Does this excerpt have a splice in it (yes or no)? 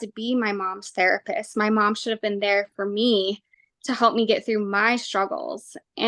no